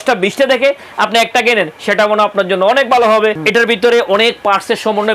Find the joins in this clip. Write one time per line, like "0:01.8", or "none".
0:03.4